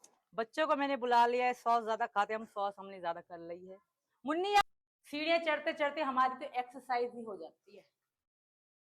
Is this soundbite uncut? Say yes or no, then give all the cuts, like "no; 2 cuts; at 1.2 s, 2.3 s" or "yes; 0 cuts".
no; 1 cut; at 4.6 s